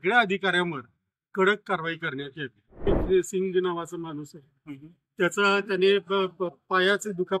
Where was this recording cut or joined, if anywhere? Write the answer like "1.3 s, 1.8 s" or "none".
2.9 s